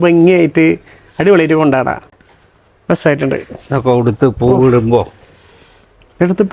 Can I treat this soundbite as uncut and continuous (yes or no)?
yes